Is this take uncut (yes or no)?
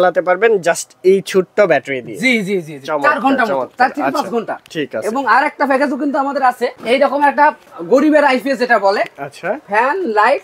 yes